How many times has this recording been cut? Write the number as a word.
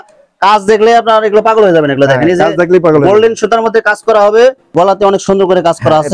one